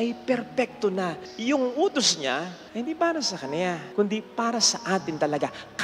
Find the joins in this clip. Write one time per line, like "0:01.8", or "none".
0:01.3
0:02.6
0:03.8